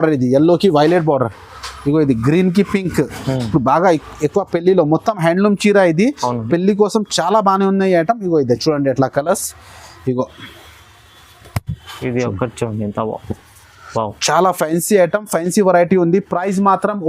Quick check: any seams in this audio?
no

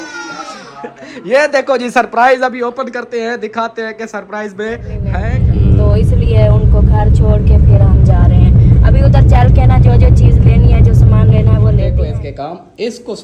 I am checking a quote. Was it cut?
yes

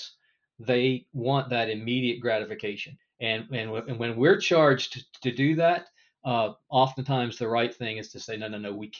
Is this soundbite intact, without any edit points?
no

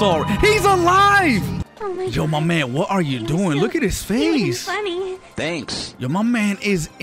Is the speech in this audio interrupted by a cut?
yes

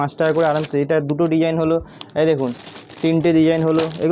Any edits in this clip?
no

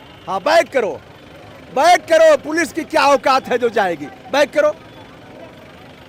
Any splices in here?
no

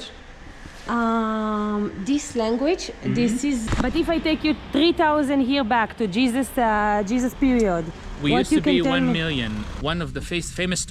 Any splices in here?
yes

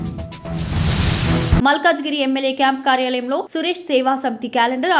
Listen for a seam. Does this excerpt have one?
no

